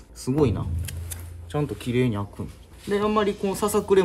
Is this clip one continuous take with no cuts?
yes; 0 cuts

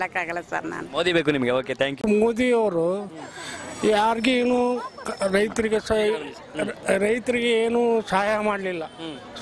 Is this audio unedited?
no; 1 cut; at 2.0 s

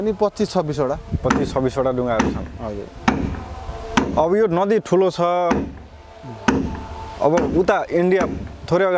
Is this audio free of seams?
yes; 0 cuts

